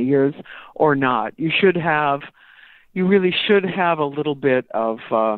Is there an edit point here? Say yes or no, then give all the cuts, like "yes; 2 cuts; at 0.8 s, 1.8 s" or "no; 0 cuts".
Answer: no; 0 cuts